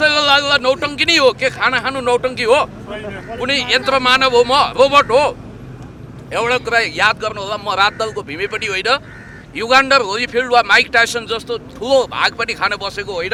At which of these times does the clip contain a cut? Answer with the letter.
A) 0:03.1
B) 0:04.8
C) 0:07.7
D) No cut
D